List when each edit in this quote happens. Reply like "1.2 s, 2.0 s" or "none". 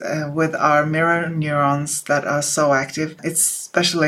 3.2 s